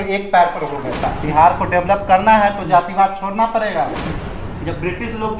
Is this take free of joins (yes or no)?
no